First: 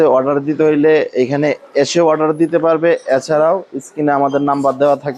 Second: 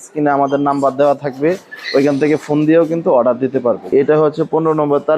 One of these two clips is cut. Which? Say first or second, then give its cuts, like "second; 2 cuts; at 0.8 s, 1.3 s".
second; 1 cut; at 3.9 s